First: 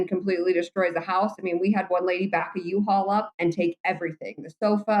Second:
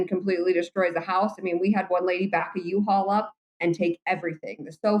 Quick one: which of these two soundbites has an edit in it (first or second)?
first